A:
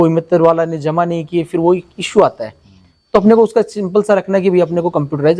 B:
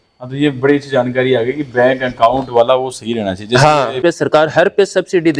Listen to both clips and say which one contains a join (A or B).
B